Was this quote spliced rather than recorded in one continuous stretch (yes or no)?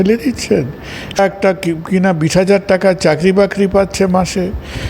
yes